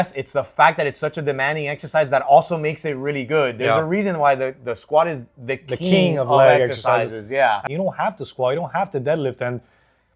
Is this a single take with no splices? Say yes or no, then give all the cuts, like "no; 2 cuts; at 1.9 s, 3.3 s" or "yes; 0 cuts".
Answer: no; 1 cut; at 7.6 s